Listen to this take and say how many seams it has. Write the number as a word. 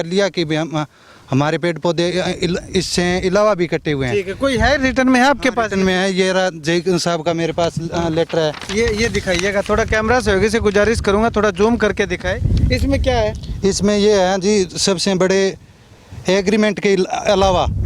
zero